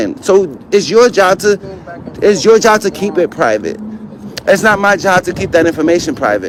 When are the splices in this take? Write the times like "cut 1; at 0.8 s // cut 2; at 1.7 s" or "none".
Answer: none